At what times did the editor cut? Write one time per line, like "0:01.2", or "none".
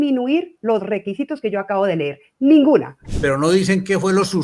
0:03.0